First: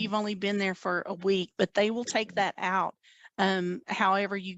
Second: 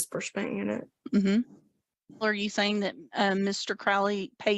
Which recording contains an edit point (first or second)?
second